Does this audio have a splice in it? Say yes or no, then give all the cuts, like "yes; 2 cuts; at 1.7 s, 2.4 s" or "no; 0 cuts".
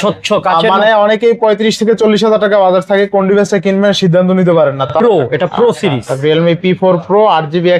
yes; 1 cut; at 4.9 s